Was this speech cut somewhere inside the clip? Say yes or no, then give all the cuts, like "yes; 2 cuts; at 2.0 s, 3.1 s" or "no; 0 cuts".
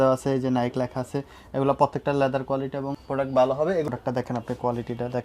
yes; 1 cut; at 3.9 s